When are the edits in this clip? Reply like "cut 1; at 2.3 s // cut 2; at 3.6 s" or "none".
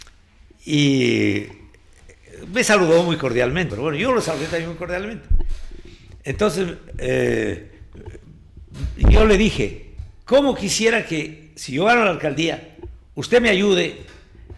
cut 1; at 3.7 s